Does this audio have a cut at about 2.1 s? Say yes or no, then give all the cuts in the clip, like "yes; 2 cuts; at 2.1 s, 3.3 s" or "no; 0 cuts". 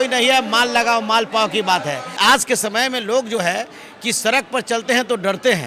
yes; 1 cut; at 2.1 s